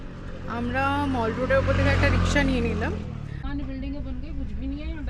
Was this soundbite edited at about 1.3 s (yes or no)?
no